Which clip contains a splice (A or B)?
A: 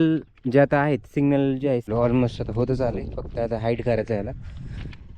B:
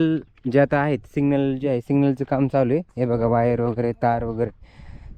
A